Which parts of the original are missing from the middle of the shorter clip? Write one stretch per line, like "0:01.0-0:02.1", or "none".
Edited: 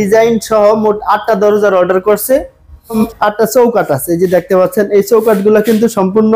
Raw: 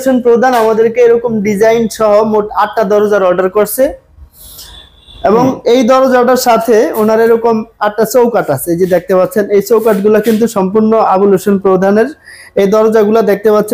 0:04.4-0:07.5